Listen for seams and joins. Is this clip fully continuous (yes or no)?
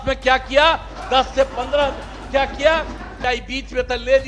no